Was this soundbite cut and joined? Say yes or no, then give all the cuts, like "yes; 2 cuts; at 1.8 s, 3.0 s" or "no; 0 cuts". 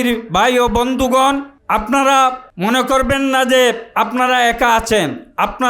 yes; 2 cuts; at 1.5 s, 2.5 s